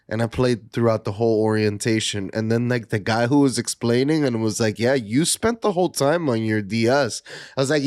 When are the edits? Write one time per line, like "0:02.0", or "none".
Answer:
none

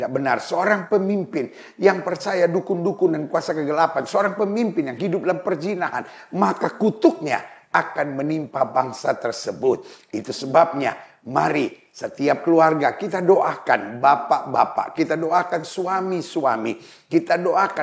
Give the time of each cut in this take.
none

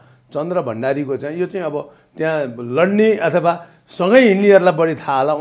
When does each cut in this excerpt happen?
none

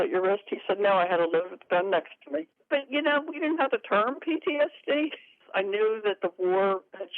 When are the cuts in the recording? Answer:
0:02.6
0:05.4

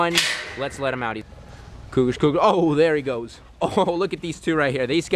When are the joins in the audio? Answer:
0:01.2

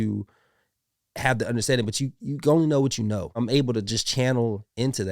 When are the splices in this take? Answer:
0:03.4

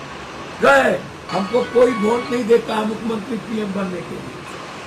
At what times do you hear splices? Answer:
0:01.2

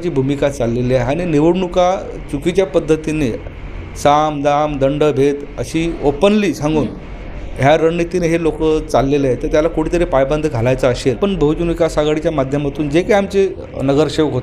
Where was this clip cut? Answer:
0:11.2

